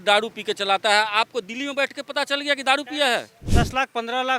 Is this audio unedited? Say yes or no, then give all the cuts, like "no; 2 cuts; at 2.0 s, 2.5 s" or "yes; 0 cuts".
no; 1 cut; at 3.4 s